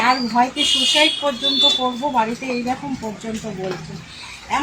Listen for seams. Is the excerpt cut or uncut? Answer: uncut